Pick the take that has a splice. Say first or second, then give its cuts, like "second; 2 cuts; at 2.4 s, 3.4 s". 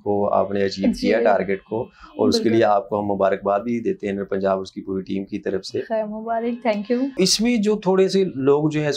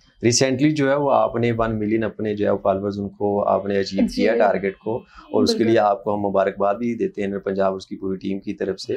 first; 1 cut; at 7.1 s